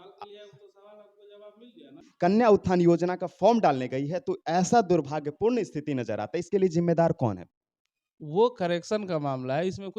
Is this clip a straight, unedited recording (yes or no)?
no